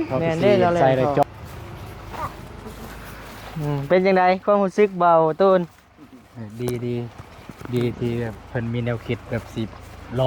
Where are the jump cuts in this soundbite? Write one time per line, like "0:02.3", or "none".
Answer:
0:01.2